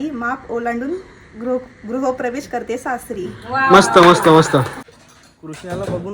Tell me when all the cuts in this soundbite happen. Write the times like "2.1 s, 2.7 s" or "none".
4.8 s